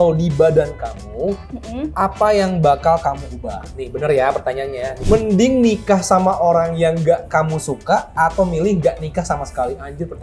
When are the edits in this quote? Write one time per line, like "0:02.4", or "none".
0:05.0